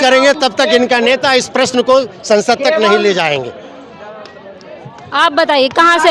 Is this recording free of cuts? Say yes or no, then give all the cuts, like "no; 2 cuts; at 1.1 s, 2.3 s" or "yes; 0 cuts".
yes; 0 cuts